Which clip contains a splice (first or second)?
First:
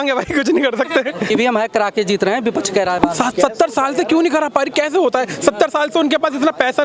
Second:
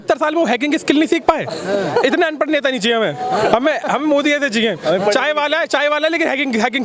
first